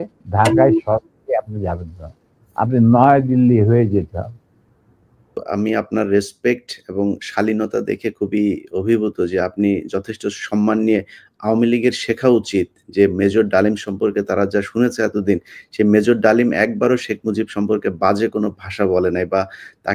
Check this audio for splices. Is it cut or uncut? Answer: cut